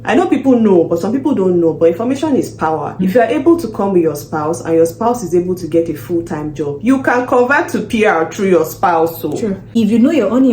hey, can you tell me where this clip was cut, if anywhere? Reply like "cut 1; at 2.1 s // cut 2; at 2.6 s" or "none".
cut 1; at 3.0 s // cut 2; at 9.7 s